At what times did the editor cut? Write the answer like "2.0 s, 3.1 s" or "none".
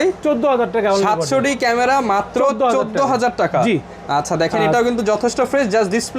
none